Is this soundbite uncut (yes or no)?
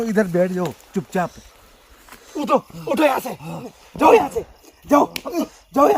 no